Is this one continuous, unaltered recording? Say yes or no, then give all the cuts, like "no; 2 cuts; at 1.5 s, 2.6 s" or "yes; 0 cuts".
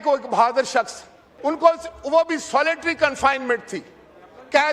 no; 1 cut; at 1.3 s